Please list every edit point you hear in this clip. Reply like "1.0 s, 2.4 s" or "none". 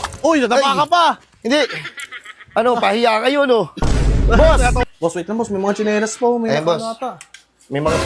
4.8 s